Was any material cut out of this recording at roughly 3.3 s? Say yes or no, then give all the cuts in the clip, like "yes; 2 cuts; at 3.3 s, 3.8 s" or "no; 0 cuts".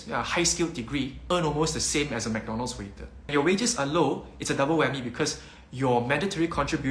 yes; 2 cuts; at 1.2 s, 3.3 s